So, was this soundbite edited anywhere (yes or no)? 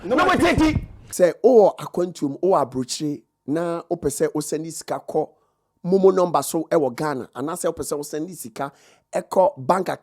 yes